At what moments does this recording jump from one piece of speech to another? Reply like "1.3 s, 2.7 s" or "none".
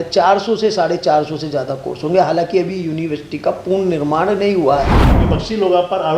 5.1 s